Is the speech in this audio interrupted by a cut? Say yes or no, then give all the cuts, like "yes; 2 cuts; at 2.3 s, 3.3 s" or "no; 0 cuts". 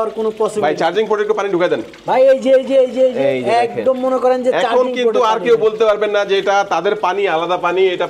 no; 0 cuts